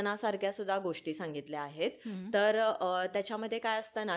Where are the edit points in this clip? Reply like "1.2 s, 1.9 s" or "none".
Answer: none